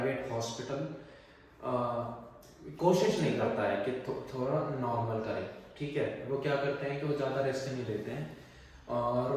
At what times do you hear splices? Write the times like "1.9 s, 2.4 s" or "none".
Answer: none